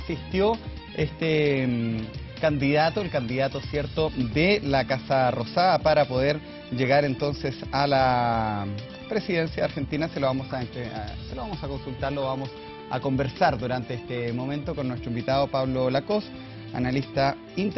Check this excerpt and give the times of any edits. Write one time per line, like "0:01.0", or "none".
none